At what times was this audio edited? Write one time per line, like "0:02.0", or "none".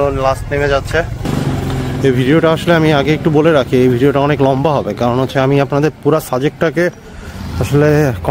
0:01.3